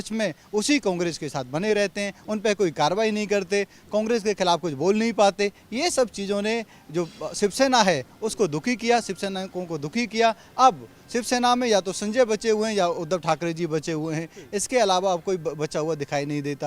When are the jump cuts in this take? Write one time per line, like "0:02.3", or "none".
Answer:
none